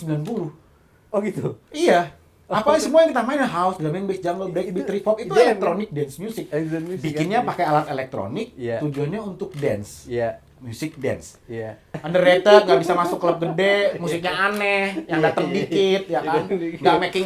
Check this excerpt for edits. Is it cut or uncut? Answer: cut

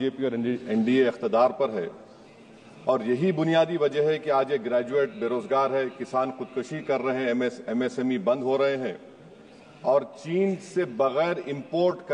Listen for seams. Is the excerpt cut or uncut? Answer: uncut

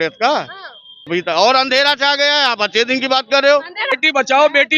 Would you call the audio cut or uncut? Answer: cut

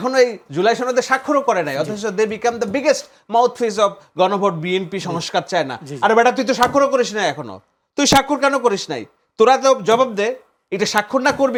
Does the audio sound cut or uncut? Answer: uncut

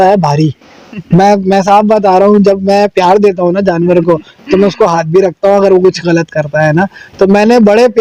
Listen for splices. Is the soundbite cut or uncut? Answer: uncut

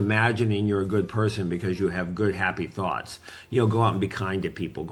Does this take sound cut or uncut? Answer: uncut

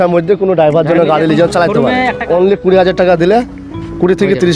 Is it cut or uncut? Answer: cut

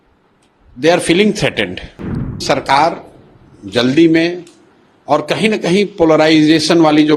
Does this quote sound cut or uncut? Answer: cut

